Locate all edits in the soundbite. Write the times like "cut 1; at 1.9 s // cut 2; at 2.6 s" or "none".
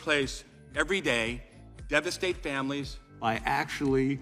cut 1; at 3.1 s